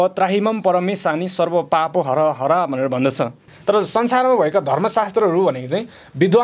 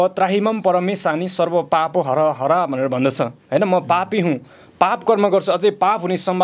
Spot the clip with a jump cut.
first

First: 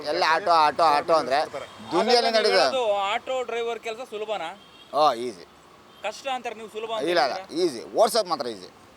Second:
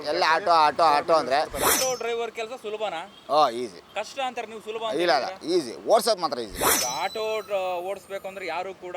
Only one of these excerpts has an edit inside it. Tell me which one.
second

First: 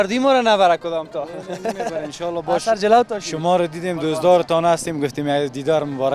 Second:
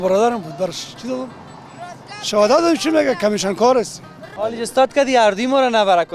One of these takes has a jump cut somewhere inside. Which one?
second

